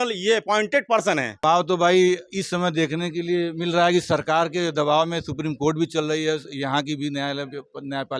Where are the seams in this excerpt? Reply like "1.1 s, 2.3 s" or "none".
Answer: 1.4 s